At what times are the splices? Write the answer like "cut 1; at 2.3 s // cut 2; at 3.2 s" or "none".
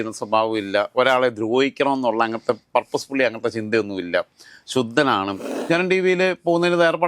cut 1; at 5.5 s